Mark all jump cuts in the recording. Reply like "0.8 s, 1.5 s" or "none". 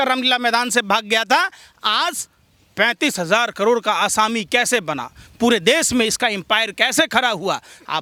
none